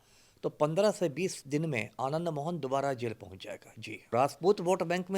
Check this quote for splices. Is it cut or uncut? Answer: cut